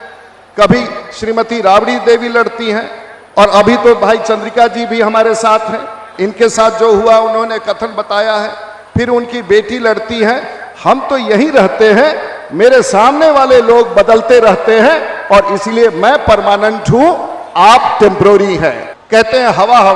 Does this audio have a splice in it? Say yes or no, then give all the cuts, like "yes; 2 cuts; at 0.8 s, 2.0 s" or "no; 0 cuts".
yes; 1 cut; at 18.9 s